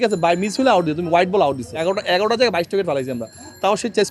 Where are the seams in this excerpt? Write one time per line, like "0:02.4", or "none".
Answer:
0:01.8